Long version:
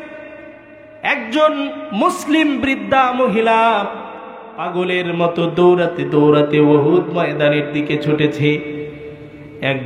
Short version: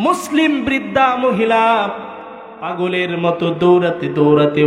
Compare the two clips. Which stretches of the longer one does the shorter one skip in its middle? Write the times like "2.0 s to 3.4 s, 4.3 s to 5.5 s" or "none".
none